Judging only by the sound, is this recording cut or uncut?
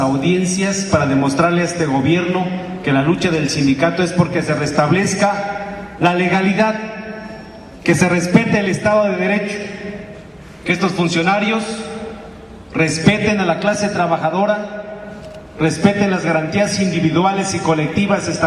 cut